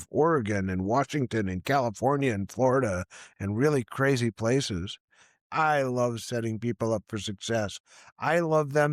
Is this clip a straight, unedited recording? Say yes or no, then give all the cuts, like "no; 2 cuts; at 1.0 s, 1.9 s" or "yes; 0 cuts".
no; 1 cut; at 5.4 s